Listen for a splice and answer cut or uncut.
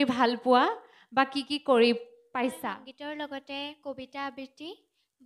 cut